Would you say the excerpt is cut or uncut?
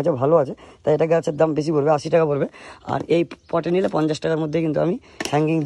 uncut